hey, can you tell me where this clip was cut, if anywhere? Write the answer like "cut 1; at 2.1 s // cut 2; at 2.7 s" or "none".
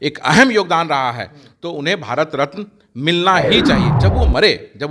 cut 1; at 3.9 s